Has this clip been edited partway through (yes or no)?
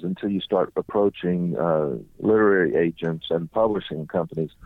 no